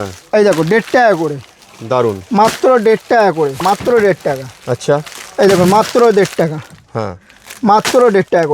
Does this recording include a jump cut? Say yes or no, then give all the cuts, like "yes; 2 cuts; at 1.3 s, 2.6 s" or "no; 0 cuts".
yes; 1 cut; at 3.6 s